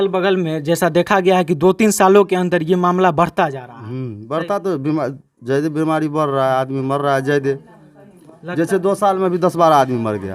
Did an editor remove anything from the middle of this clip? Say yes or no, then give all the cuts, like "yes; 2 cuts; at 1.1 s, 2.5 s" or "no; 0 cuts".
no; 0 cuts